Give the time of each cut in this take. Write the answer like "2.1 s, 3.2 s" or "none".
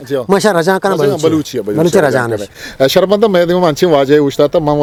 none